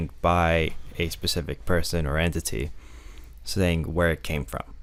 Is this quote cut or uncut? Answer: uncut